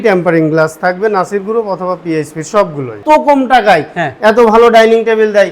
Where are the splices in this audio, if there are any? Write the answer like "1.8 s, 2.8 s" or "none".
3.0 s